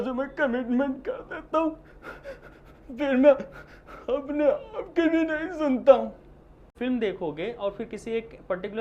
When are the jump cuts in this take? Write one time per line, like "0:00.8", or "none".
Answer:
0:06.7